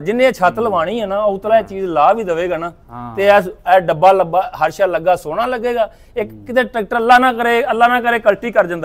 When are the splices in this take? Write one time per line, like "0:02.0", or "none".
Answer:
none